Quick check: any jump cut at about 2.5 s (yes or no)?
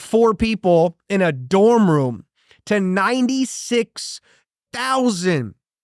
no